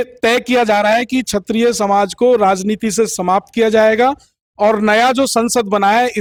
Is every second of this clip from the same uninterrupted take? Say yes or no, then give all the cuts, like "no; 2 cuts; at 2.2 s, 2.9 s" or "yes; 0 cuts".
yes; 0 cuts